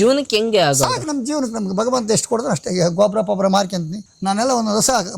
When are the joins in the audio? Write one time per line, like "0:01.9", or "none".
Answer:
0:04.0